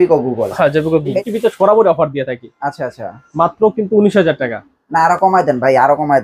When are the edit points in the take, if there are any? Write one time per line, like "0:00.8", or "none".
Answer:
0:01.1